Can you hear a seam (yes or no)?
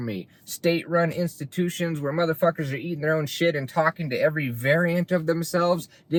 no